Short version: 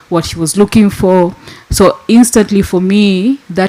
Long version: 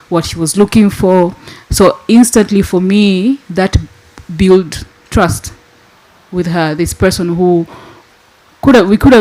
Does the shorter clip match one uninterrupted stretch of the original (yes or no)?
yes